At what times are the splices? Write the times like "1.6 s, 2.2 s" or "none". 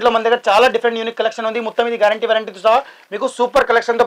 none